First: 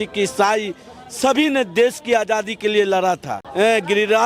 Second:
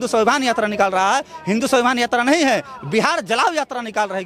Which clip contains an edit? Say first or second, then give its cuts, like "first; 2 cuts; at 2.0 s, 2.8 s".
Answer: first; 1 cut; at 3.4 s